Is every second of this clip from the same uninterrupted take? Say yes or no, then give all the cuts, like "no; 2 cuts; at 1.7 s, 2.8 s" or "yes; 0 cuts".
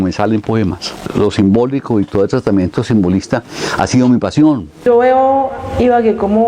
no; 2 cuts; at 0.9 s, 4.8 s